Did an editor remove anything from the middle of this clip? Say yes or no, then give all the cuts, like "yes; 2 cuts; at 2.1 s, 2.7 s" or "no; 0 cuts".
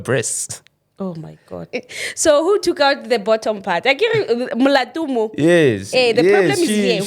yes; 1 cut; at 1.7 s